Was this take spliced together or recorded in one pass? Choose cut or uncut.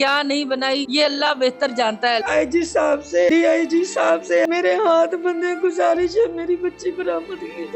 cut